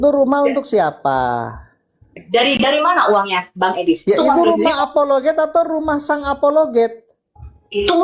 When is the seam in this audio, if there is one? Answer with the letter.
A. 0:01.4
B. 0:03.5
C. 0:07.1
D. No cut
D